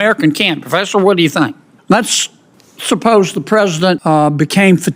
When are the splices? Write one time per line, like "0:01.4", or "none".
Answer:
0:01.7
0:04.0